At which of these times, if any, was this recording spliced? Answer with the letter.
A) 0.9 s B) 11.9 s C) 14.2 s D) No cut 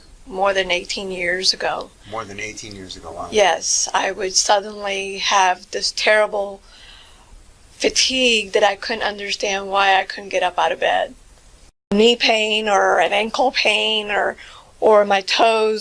B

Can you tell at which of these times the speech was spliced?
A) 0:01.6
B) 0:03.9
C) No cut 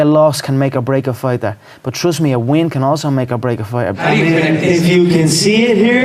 B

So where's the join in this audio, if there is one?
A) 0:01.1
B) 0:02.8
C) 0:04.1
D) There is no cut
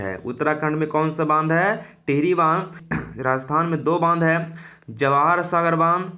B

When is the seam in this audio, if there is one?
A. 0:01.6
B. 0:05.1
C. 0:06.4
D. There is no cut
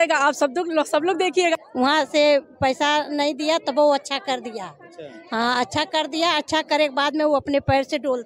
A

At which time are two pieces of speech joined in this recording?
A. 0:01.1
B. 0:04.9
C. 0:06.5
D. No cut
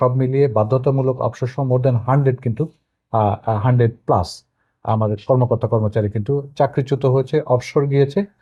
D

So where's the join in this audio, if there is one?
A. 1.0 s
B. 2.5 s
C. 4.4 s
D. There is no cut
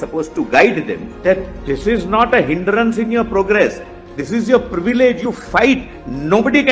A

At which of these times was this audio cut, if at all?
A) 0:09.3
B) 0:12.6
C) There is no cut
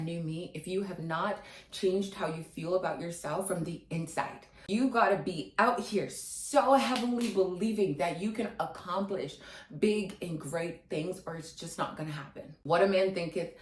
B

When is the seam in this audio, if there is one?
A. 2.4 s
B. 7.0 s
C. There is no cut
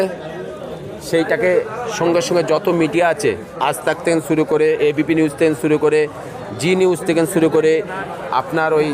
C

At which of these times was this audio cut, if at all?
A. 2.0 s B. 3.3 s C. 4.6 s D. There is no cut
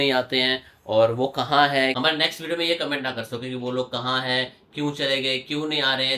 A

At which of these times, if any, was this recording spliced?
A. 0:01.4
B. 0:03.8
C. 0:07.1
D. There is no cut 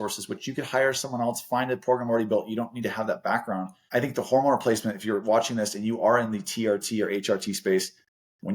B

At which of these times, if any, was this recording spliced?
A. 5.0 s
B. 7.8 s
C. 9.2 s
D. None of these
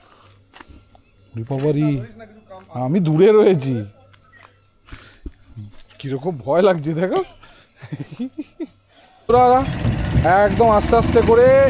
C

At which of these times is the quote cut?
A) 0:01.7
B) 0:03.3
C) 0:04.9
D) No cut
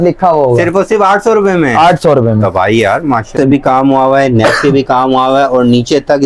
B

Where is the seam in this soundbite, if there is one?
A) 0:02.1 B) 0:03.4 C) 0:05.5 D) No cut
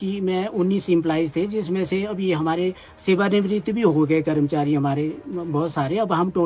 D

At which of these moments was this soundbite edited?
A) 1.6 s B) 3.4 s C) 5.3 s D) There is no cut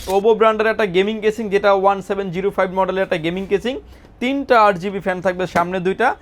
D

